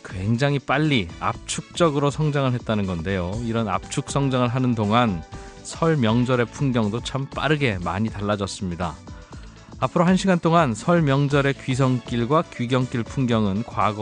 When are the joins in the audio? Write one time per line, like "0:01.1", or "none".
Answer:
none